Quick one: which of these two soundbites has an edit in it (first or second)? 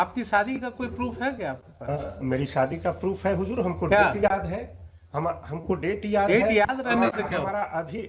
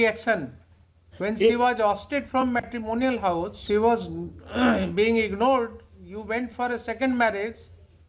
second